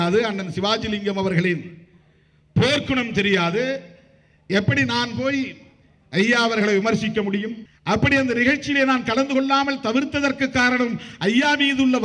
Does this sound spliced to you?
yes; 1 cut; at 7.7 s

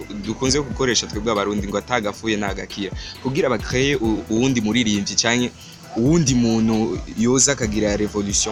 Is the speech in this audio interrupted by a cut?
no; 0 cuts

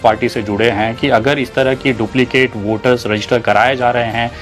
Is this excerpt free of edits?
yes; 0 cuts

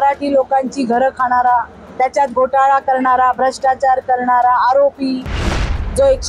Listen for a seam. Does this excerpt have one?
yes; 1 cut; at 1.8 s

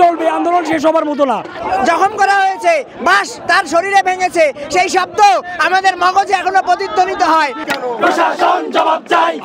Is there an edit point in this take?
yes; 2 cuts; at 1.5 s, 7.7 s

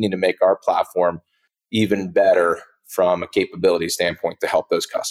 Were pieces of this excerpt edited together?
no; 0 cuts

